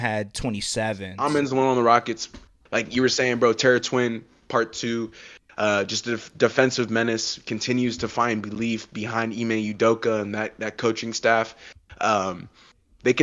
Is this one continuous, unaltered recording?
no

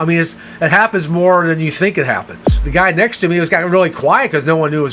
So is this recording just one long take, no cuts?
no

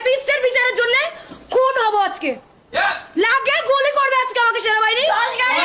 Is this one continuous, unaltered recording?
yes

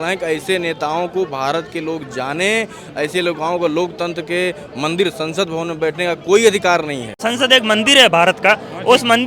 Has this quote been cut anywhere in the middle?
yes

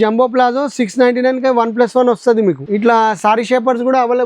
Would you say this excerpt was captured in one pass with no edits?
no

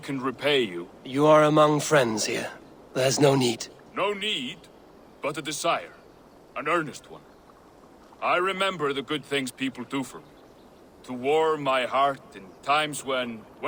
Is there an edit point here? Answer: no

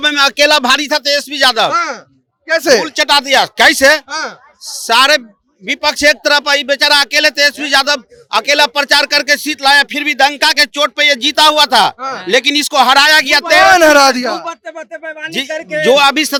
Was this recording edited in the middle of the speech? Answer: no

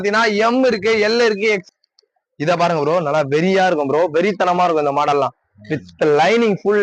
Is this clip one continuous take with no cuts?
no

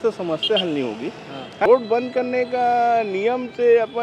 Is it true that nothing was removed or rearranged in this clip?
no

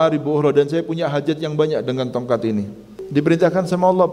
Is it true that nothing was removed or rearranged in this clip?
no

